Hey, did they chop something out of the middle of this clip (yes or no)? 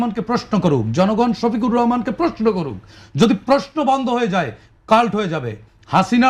no